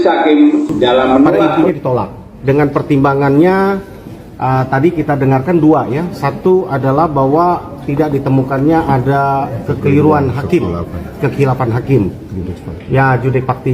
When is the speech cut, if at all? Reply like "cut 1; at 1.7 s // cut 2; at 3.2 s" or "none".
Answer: cut 1; at 1.5 s